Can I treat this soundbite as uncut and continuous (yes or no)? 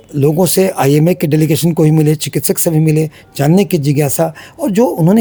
yes